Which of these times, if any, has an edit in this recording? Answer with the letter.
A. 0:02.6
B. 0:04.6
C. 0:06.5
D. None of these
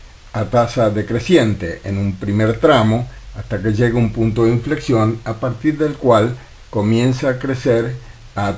B